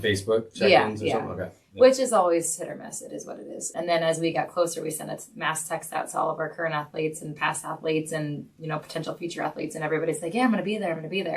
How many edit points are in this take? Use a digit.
1